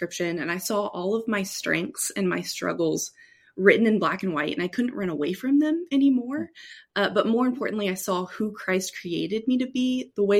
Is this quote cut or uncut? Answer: uncut